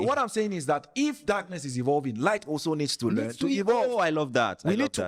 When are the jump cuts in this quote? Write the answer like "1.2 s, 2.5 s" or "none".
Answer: none